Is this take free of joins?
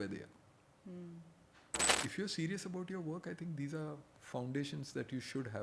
no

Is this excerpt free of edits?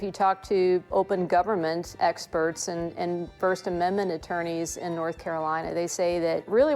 no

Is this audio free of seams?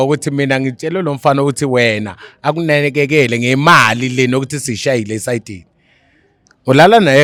yes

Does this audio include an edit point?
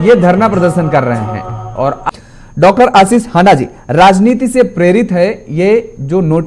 yes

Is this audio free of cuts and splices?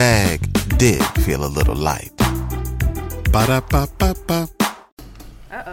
no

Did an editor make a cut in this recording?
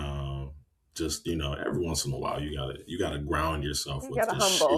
no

